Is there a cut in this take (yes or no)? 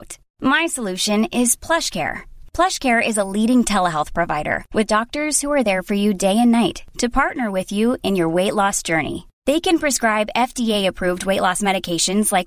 no